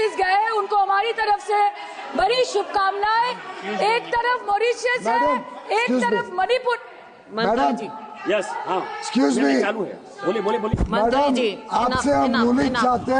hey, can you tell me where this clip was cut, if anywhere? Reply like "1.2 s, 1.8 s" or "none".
none